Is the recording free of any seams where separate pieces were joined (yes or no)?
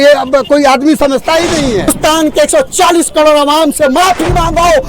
no